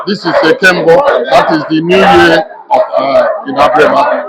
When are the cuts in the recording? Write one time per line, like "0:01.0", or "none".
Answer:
none